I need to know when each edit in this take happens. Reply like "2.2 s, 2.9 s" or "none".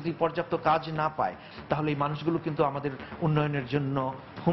1.4 s